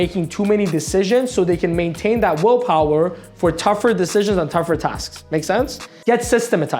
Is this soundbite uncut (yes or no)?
no